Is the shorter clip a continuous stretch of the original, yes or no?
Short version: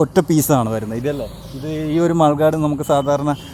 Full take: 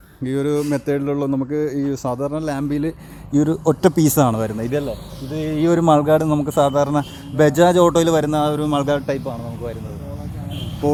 yes